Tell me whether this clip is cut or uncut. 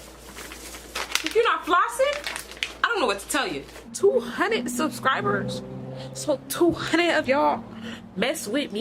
cut